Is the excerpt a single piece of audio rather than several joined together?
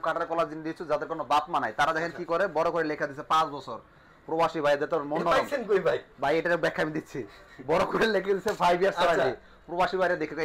yes; 0 cuts

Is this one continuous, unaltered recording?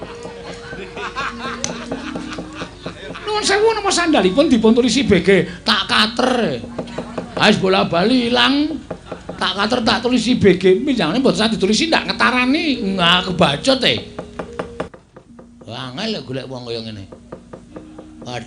no; 1 cut; at 14.9 s

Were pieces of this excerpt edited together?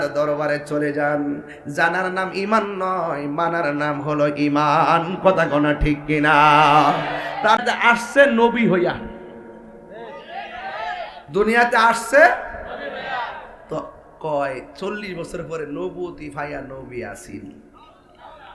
yes; 1 cut; at 7.6 s

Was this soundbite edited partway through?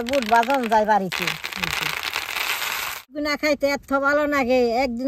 yes; 1 cut; at 3.1 s

